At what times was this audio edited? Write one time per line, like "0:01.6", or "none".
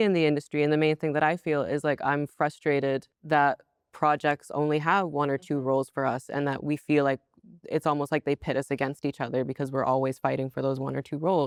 none